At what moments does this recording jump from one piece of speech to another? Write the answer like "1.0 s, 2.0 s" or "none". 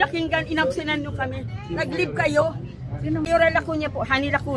3.3 s

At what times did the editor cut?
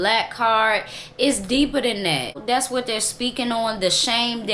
2.4 s

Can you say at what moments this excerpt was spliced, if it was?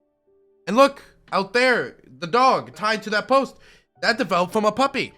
2.8 s

